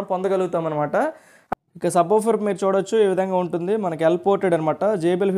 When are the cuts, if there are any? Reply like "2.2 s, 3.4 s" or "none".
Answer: 1.4 s

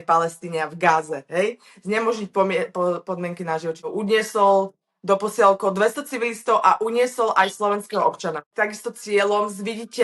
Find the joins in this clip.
3.7 s, 8.4 s

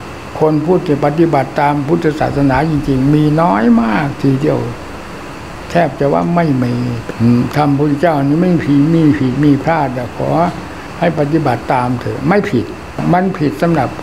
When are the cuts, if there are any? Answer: 7.0 s, 13.0 s

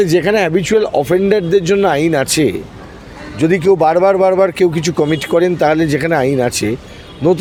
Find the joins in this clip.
none

